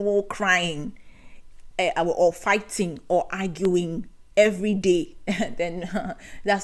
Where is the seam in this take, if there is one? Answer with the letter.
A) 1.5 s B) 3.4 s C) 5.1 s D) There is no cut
D